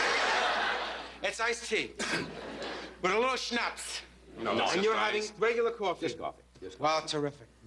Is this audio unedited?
yes; 0 cuts

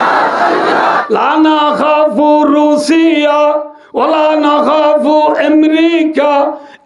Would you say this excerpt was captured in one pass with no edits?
no; 1 cut; at 1.0 s

